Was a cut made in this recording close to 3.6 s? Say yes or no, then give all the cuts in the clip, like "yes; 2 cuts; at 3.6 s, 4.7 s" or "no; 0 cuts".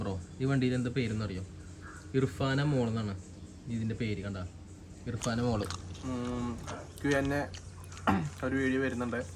no; 1 cut; at 5.9 s